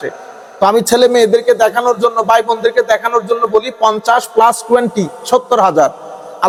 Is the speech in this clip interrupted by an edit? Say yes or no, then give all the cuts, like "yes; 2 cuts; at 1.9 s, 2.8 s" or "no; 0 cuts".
no; 0 cuts